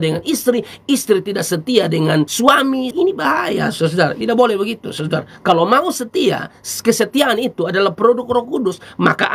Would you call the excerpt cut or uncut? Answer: cut